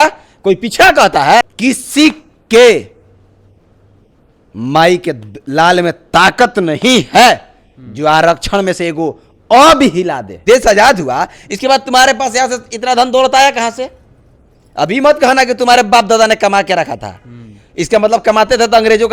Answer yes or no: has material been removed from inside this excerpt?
yes